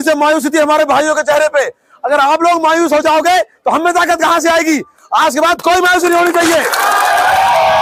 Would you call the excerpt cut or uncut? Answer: uncut